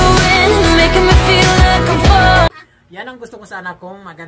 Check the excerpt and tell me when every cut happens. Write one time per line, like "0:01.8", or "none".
0:02.5